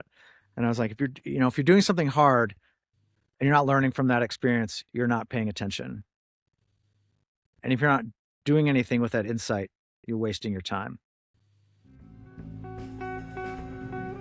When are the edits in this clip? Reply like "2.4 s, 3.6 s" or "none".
none